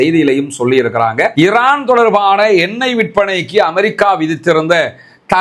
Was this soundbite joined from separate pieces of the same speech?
yes; 1 cut; at 1.3 s

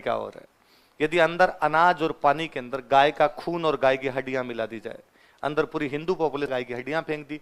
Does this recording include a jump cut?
yes; 1 cut; at 6.5 s

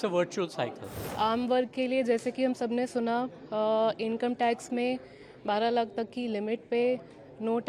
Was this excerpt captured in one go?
no; 1 cut; at 1.0 s

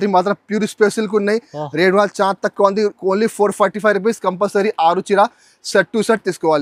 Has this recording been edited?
no; 0 cuts

